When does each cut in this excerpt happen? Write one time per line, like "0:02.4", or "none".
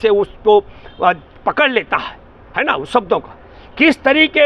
none